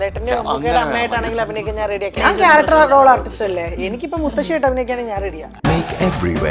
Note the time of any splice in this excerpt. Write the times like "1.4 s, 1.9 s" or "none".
2.2 s, 5.5 s